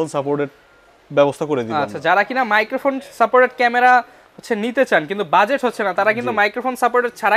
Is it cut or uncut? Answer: uncut